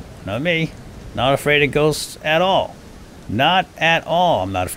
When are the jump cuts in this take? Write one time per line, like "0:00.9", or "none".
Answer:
none